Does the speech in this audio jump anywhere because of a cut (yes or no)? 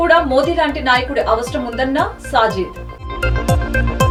no